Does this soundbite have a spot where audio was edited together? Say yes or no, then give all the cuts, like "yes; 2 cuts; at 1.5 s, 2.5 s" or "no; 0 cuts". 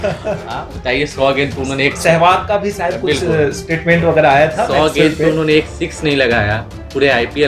no; 0 cuts